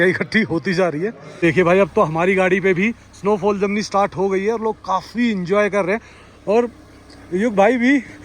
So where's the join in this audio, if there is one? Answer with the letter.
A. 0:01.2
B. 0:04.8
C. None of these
A